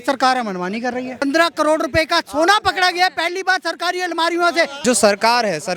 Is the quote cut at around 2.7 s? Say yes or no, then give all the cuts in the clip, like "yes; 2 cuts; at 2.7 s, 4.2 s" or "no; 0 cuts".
no; 2 cuts; at 1.2 s, 4.8 s